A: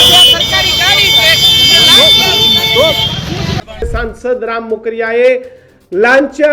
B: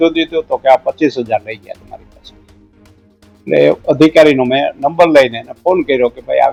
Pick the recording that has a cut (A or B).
A